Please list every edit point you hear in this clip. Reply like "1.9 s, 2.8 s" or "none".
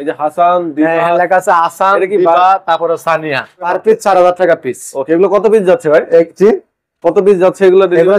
3.7 s